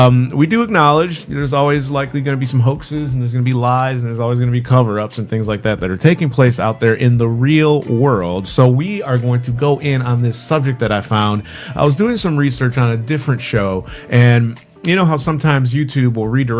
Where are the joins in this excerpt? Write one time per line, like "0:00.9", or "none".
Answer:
0:15.4